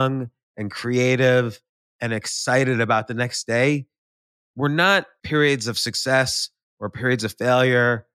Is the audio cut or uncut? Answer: cut